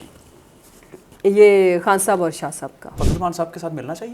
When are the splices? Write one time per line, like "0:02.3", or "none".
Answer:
0:02.9

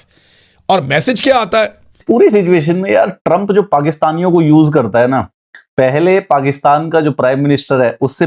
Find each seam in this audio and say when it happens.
0:01.9

